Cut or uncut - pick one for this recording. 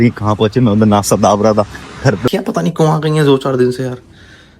cut